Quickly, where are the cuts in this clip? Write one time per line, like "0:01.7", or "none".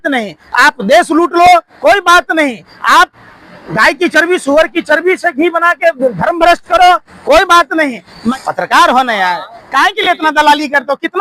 0:08.3